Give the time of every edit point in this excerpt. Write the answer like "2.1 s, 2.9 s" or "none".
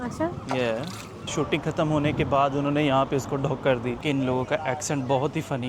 1.2 s, 4.0 s